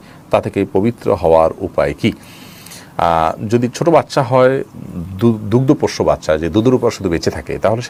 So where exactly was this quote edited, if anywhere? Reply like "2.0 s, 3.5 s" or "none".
none